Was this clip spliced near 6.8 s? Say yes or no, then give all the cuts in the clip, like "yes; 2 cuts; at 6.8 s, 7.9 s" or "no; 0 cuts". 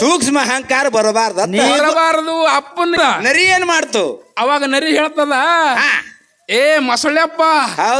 no; 1 cut; at 3.0 s